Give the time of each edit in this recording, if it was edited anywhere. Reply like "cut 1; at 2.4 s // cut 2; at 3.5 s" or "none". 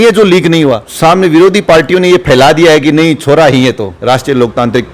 cut 1; at 0.8 s // cut 2; at 4.0 s